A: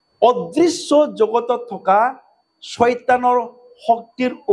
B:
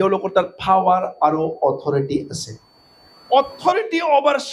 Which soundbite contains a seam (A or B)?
B